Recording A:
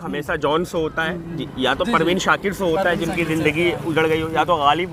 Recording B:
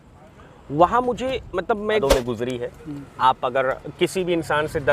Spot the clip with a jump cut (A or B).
B